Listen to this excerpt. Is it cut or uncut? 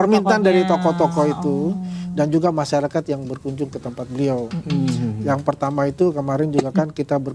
uncut